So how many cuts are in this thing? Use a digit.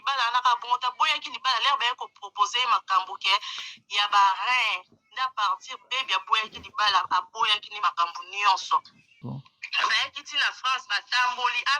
1